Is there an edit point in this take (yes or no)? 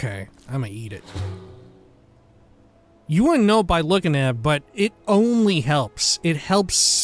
no